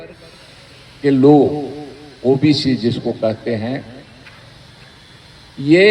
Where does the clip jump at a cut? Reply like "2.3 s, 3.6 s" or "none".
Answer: none